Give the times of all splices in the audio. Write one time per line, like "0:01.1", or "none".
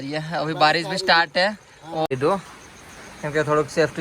0:02.1